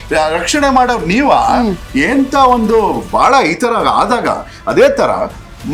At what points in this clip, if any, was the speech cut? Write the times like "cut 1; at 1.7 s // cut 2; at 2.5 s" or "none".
none

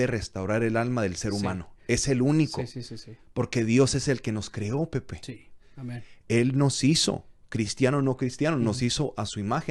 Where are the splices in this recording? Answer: none

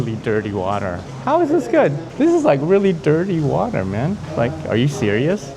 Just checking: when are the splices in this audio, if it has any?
cut 1; at 1.1 s // cut 2; at 2.1 s

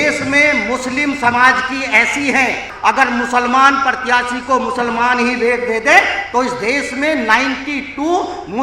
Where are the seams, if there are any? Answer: cut 1; at 2.7 s

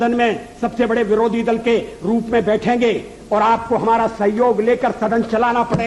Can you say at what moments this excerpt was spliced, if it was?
none

